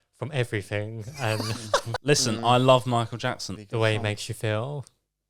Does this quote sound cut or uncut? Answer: cut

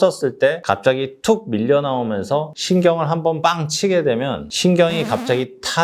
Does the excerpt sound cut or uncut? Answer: uncut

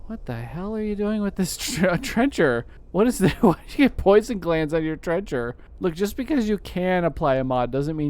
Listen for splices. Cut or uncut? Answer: cut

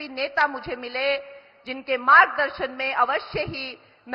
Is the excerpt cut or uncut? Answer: uncut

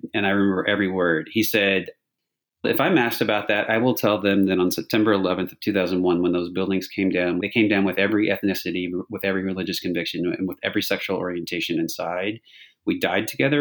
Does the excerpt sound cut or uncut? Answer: uncut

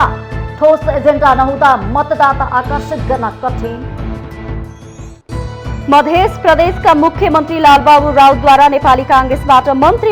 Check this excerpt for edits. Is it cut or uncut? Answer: uncut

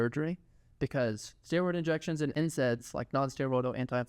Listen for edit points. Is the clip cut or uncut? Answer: cut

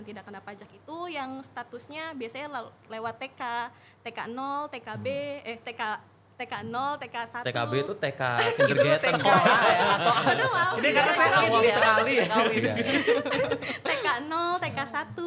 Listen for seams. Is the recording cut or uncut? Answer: uncut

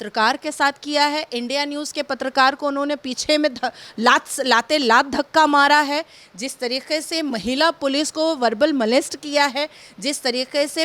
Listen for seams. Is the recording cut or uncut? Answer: uncut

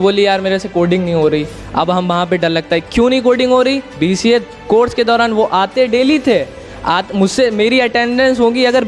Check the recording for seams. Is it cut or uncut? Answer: uncut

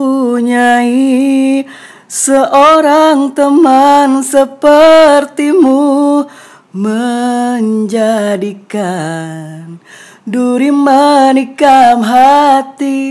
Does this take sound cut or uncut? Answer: uncut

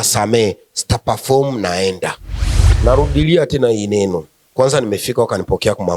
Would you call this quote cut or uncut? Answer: cut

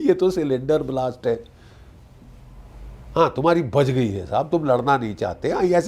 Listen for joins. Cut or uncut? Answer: uncut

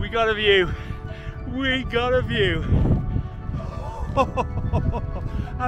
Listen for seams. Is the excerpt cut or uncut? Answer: uncut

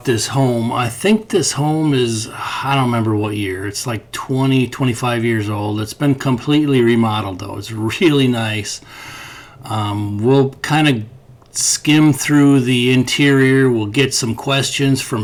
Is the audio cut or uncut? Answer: uncut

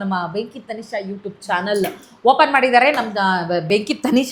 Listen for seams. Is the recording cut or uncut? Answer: uncut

